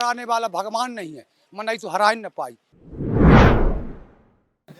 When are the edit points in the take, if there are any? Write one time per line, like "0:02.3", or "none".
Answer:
none